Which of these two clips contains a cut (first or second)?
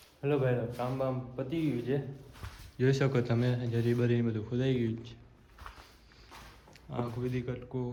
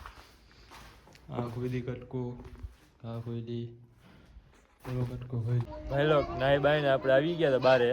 second